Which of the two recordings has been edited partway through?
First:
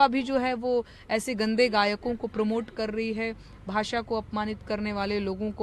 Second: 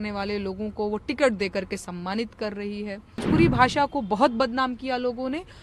second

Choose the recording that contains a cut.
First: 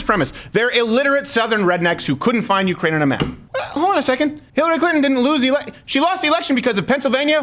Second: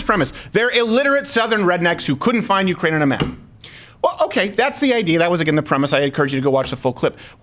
first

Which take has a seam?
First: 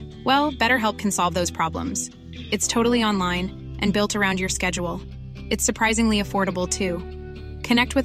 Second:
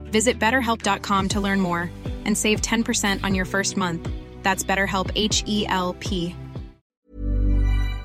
second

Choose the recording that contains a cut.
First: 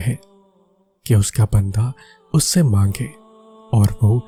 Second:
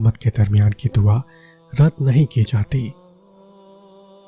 second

